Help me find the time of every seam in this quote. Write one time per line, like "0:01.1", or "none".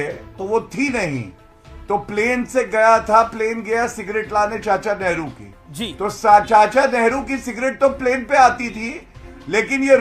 none